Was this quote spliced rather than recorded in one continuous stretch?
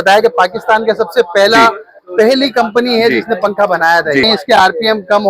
yes; 1 cut; at 4.2 s

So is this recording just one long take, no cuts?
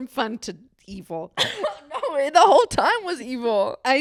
yes; 0 cuts

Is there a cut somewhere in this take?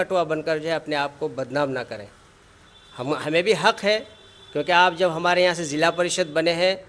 no; 0 cuts

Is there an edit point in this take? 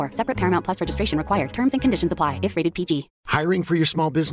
no; 0 cuts

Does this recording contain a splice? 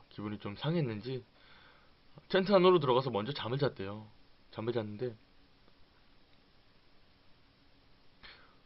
yes; 1 cut; at 5.1 s

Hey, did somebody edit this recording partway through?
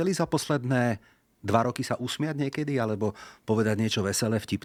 no; 0 cuts

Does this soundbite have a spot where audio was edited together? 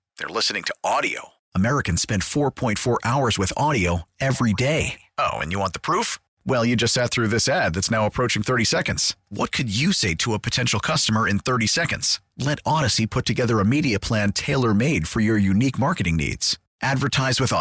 no; 0 cuts

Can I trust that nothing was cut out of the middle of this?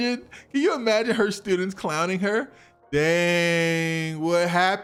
yes; 0 cuts

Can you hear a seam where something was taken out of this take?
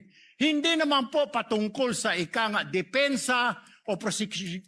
no; 0 cuts

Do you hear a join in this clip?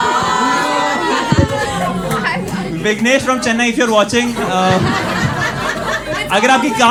no; 0 cuts

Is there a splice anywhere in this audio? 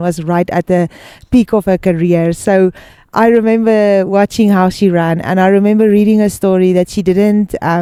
no; 0 cuts

